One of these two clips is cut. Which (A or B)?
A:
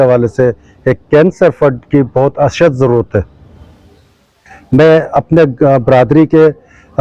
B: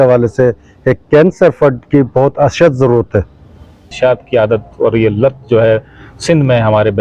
B